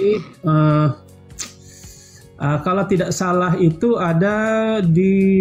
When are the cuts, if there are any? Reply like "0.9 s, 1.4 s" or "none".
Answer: none